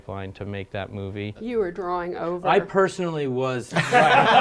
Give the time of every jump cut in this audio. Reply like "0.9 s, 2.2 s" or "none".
1.4 s